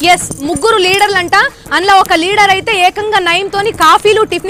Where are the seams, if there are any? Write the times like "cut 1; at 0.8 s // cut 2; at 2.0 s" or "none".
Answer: none